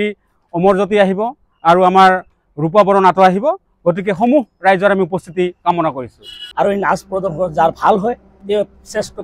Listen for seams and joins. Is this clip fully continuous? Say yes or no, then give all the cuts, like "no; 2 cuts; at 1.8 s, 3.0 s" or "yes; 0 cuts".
no; 1 cut; at 6.4 s